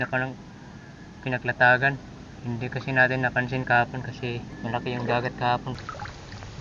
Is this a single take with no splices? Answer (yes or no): no